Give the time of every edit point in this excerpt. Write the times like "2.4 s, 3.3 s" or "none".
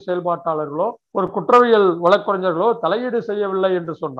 1.0 s